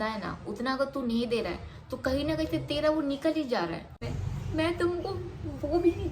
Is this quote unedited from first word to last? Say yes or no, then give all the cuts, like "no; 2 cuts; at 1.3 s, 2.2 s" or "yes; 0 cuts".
no; 1 cut; at 4.0 s